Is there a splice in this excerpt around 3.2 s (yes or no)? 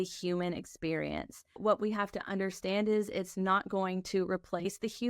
no